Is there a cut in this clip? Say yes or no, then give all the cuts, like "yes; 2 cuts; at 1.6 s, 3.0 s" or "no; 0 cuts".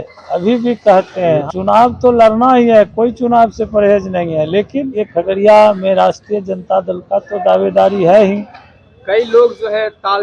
yes; 2 cuts; at 1.4 s, 5.1 s